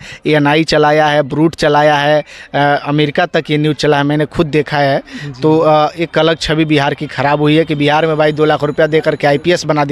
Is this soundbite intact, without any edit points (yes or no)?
yes